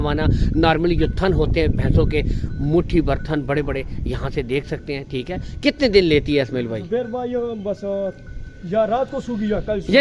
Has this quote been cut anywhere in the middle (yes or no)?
no